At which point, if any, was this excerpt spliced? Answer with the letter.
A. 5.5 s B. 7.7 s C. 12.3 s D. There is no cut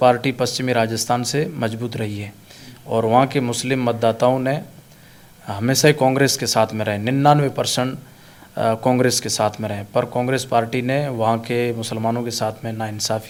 D